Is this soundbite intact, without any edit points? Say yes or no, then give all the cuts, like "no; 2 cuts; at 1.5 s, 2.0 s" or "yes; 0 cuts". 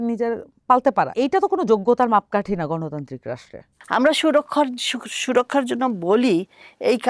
no; 2 cuts; at 1.1 s, 3.7 s